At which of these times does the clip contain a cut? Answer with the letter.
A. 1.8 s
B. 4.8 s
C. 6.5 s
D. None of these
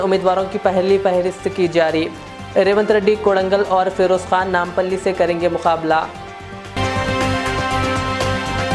D